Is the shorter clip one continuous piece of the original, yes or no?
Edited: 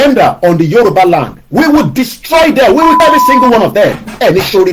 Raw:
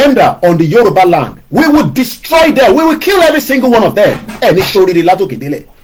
no